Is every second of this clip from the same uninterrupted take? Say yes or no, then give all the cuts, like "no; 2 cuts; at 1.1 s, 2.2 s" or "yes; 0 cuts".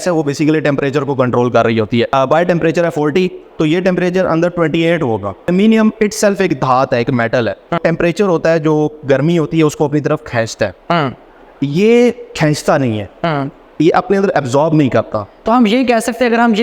no; 3 cuts; at 2.1 s, 5.5 s, 7.8 s